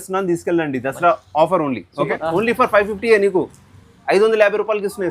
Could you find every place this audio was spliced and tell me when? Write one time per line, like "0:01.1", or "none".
0:02.1